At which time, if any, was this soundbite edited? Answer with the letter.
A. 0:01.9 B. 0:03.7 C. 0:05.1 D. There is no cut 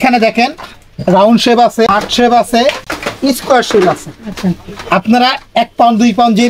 A